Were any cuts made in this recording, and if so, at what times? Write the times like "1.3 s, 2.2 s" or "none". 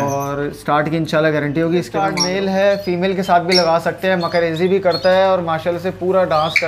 2.2 s